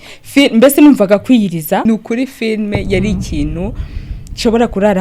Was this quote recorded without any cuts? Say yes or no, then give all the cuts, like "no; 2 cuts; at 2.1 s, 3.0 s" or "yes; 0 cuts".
no; 1 cut; at 1.8 s